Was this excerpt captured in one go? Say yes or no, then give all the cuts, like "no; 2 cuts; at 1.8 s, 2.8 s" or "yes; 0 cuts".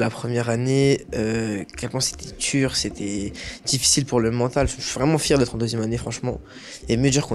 yes; 0 cuts